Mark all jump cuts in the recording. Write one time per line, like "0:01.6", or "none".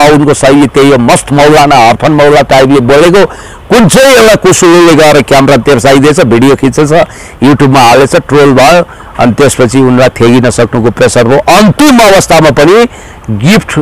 none